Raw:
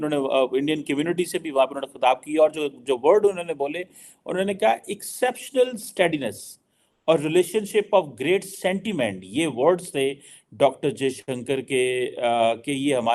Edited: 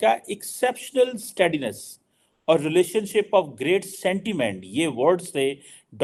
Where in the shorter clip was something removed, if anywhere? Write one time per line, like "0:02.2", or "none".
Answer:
none